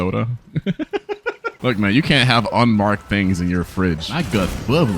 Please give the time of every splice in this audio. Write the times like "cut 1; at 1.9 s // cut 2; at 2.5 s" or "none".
cut 1; at 4.1 s